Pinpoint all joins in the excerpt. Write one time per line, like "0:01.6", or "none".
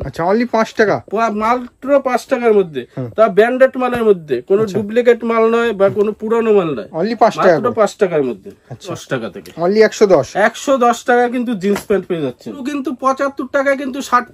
0:09.0
0:12.7